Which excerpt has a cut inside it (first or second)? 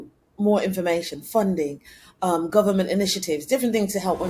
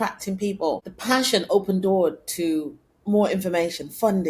second